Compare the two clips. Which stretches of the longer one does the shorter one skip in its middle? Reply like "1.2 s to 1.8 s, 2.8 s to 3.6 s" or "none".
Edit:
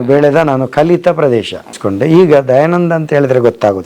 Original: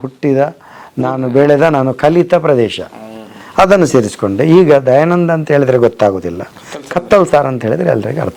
3.1 s to 4.2 s